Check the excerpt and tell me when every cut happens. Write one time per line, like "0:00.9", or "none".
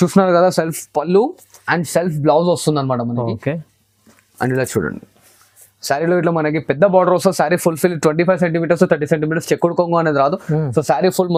none